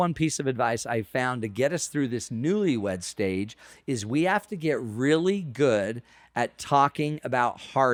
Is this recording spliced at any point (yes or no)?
no